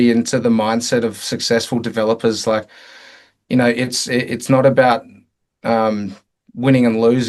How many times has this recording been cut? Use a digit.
0